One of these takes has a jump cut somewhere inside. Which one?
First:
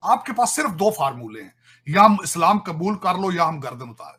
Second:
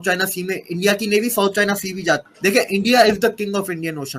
second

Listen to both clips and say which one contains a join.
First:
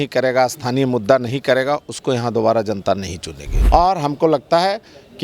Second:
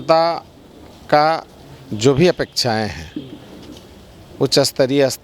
first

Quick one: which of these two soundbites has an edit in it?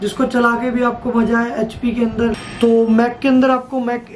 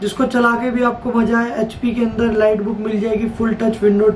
first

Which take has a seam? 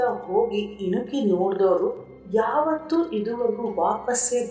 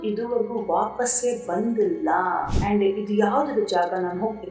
second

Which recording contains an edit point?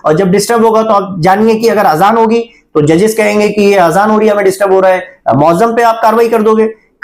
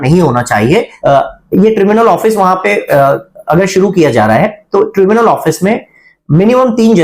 second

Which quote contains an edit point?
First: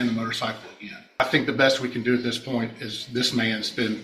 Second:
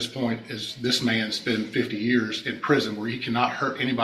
first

